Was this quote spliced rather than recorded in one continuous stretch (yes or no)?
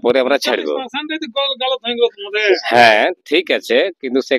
no